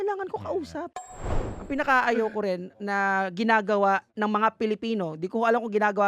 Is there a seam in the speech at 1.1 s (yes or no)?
yes